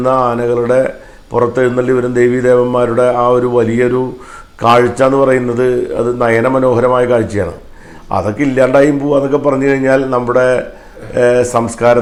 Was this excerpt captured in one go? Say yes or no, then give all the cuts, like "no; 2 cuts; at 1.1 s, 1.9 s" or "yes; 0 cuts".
yes; 0 cuts